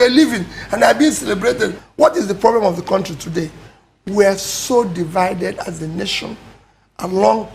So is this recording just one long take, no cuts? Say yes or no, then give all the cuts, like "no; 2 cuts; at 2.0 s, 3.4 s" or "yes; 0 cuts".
no; 1 cut; at 1.8 s